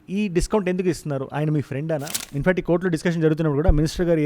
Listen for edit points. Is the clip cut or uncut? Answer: cut